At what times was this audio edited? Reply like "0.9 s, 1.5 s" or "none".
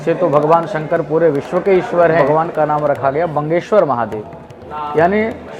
2.2 s